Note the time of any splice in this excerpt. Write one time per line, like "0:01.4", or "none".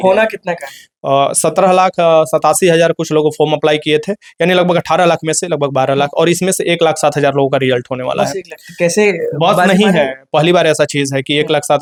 none